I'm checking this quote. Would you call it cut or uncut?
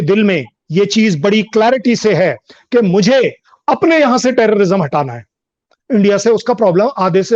uncut